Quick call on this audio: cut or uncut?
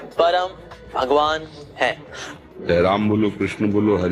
cut